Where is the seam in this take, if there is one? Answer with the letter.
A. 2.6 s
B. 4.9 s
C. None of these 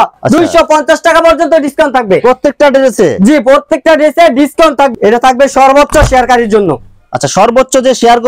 B